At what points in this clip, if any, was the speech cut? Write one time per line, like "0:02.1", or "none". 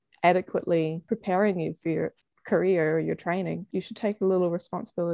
0:01.0
0:02.2
0:03.7